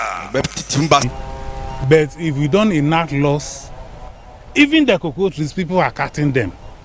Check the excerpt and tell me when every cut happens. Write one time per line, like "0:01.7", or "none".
0:01.1